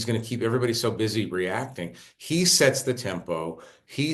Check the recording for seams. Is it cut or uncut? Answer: uncut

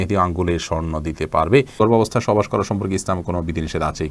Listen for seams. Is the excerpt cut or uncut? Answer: cut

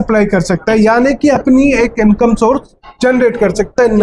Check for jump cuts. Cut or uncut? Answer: uncut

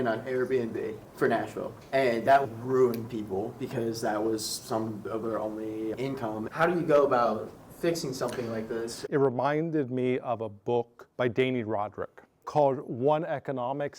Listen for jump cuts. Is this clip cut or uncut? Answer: cut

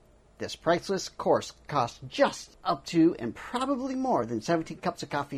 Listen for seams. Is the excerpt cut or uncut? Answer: cut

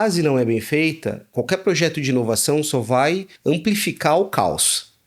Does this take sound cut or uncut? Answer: cut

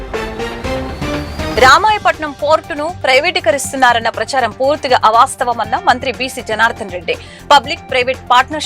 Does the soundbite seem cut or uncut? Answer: uncut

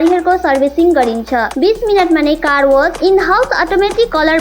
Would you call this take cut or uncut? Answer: uncut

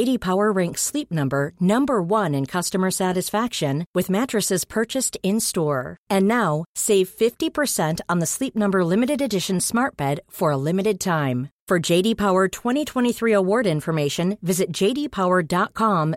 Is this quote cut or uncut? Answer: uncut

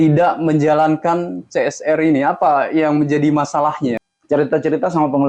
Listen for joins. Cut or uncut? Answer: cut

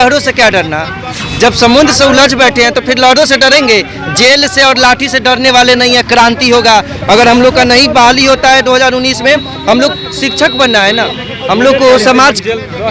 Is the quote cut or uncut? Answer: uncut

